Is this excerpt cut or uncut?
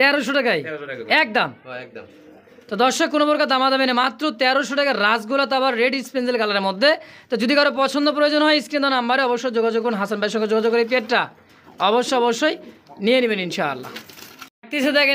uncut